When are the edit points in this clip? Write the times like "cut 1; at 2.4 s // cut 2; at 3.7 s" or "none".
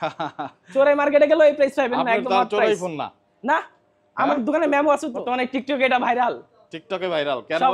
cut 1; at 5.2 s